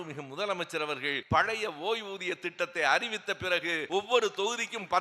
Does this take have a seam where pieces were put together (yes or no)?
yes